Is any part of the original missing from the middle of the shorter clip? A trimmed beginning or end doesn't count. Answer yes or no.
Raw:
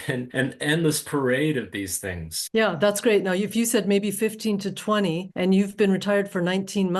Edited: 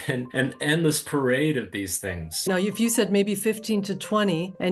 yes